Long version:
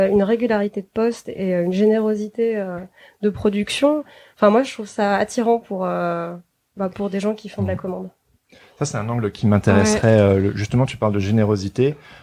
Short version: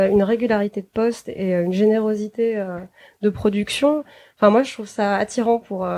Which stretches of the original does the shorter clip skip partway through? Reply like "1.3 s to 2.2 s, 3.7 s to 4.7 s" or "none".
none